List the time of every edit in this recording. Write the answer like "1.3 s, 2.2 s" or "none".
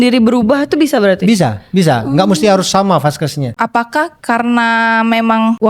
3.5 s